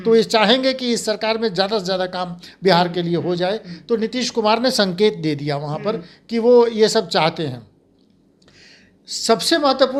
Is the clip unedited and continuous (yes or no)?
yes